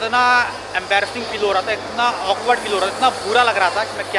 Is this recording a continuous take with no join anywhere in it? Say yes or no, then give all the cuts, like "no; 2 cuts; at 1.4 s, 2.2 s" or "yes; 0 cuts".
yes; 0 cuts